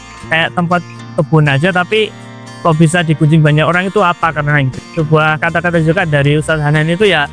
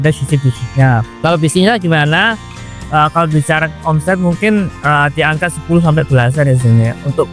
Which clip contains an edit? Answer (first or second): first